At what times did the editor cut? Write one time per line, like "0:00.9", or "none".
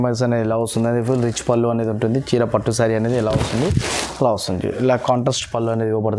none